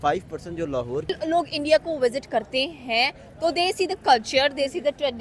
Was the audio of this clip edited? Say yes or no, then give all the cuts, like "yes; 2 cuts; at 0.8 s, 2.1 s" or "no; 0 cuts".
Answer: yes; 1 cut; at 1.1 s